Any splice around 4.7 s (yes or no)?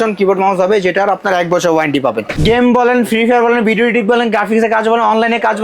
no